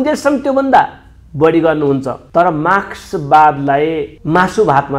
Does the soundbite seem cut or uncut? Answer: cut